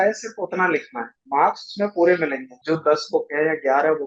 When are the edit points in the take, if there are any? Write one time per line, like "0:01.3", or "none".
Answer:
0:01.2
0:02.5